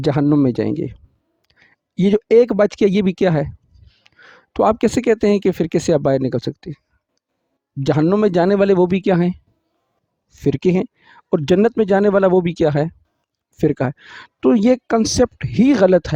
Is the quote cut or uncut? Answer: uncut